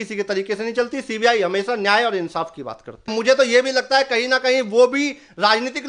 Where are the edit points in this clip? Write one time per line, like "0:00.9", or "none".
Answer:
0:03.1